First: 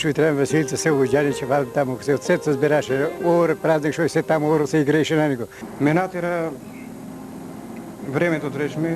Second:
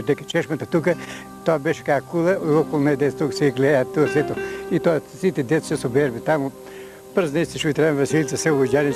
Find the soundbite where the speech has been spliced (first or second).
first